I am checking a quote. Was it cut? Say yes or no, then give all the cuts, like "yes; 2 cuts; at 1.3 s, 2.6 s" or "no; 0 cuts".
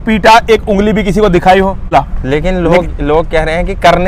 yes; 1 cut; at 1.9 s